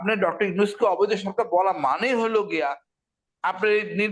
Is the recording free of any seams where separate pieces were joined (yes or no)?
yes